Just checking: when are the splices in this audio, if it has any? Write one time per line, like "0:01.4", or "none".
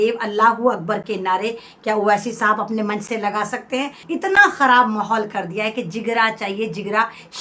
0:04.0